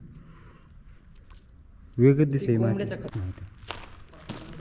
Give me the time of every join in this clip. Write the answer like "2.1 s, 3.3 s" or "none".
3.1 s